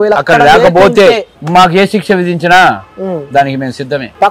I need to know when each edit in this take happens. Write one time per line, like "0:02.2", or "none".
0:01.3